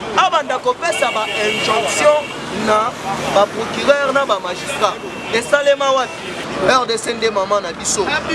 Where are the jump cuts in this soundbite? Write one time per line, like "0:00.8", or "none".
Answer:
0:06.4

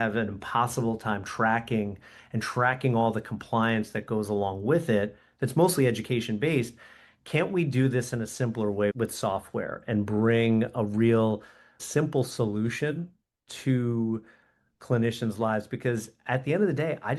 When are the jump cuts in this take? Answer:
0:08.9
0:11.8

